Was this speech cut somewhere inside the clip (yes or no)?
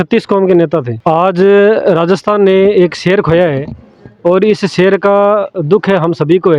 yes